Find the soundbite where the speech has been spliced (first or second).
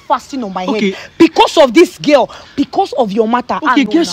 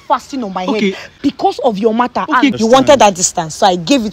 second